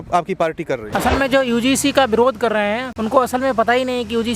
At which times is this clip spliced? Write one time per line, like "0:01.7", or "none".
0:00.9
0:02.9